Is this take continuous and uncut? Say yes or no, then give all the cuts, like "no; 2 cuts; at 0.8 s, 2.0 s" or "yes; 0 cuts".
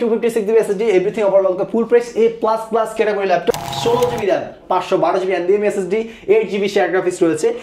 no; 1 cut; at 3.5 s